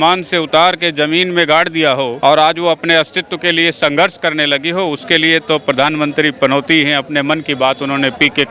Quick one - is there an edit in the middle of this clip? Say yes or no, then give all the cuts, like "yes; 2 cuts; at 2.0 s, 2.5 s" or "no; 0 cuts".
no; 0 cuts